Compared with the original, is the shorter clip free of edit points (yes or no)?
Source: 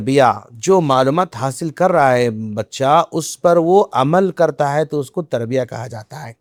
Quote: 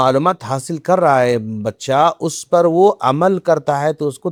yes